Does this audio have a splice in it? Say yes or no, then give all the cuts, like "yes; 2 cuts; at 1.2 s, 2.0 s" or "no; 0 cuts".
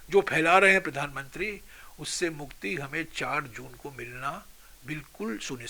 no; 0 cuts